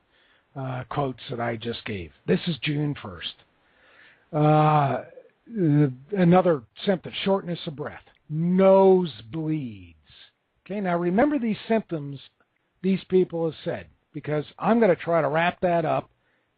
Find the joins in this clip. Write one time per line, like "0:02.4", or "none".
0:06.7